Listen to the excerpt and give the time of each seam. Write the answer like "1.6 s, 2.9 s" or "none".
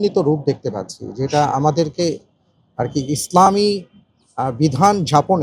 none